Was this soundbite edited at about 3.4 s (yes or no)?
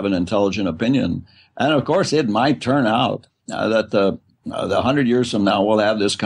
no